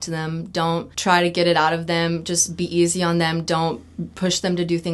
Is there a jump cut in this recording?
yes; 1 cut; at 0.9 s

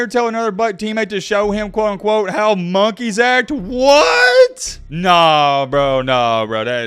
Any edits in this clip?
no; 0 cuts

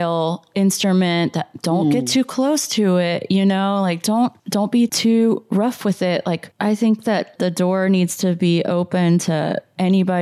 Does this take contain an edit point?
no; 0 cuts

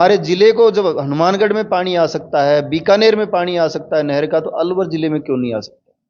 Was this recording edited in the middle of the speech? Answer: no; 0 cuts

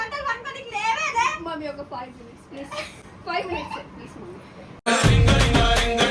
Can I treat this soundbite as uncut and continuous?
yes; 0 cuts

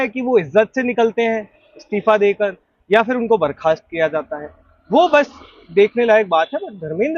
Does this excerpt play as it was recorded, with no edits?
yes; 0 cuts

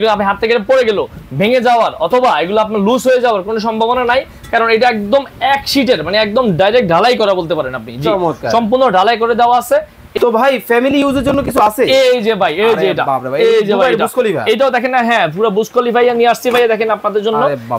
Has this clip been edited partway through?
yes; 1 cut; at 10.1 s

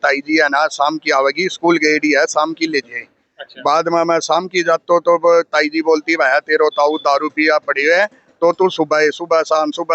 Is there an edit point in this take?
no; 0 cuts

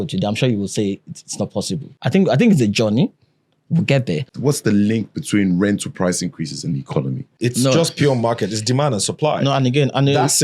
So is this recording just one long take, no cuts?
no; 3 cuts; at 1.9 s, 4.3 s, 7.3 s

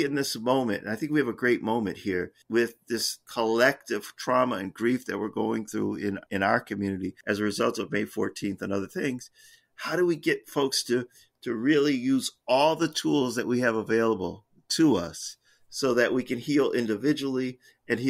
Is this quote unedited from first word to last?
yes; 0 cuts

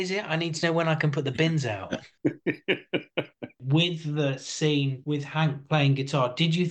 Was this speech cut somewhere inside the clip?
yes; 3 cuts; at 2.1 s, 3.6 s, 5.0 s

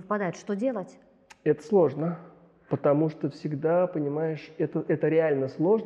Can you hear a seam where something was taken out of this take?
no; 0 cuts

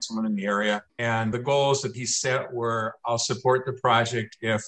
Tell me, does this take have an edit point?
yes; 1 cut; at 0.9 s

